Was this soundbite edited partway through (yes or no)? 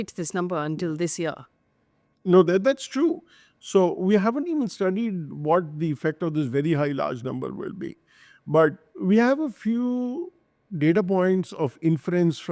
no